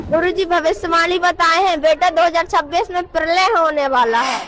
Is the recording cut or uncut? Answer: uncut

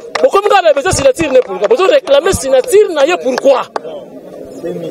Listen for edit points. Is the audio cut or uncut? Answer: uncut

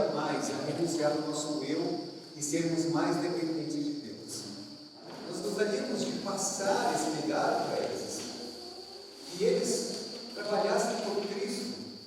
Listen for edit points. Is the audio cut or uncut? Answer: cut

